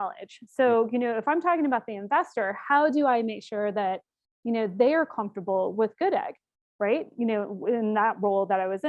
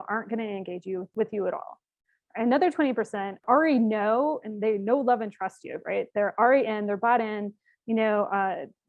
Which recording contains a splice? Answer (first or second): second